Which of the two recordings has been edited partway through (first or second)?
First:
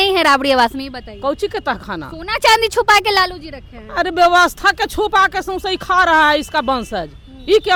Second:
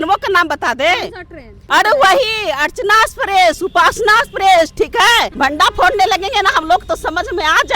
second